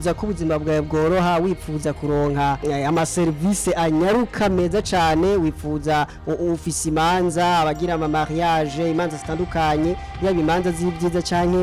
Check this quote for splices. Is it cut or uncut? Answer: uncut